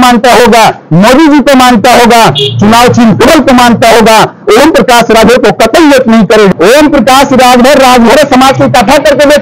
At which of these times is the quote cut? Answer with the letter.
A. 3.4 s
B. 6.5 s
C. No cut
B